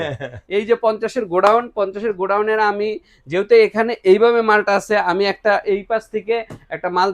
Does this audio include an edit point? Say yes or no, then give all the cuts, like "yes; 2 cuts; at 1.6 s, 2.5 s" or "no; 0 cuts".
no; 0 cuts